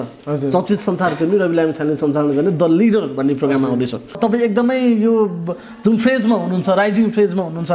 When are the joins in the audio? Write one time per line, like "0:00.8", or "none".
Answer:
0:04.2